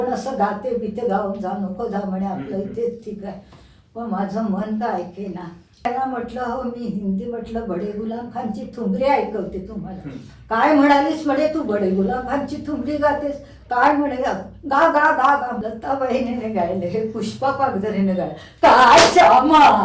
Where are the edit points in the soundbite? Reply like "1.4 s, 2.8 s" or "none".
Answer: 5.9 s, 15.6 s